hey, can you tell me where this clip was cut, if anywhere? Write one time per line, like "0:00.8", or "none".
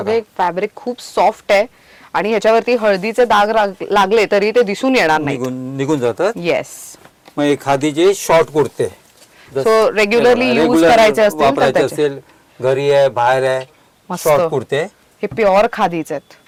none